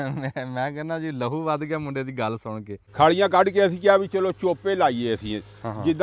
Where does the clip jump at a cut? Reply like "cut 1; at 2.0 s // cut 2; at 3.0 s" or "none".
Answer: cut 1; at 2.8 s